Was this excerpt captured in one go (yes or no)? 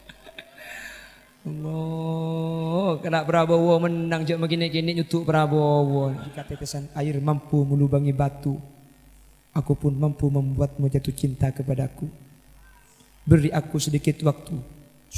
no